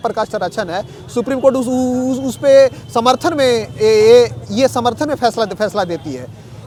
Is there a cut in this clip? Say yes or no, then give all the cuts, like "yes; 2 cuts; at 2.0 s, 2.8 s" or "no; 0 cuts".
no; 0 cuts